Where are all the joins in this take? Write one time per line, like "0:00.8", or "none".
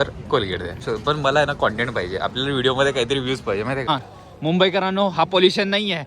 0:00.8
0:03.9

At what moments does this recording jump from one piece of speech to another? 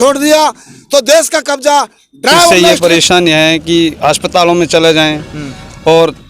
0:02.5

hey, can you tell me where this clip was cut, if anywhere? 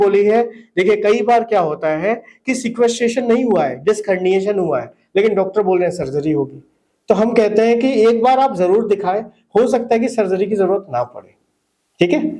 none

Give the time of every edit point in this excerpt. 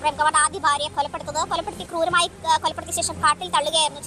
none

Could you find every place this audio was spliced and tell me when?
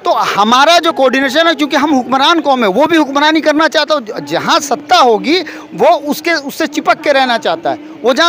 none

